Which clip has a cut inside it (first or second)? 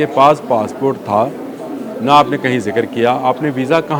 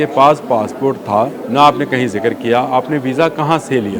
second